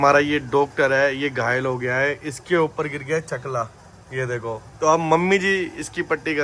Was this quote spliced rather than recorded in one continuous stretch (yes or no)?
no